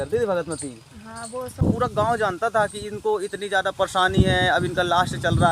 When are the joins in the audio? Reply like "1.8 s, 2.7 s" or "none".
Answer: 1.6 s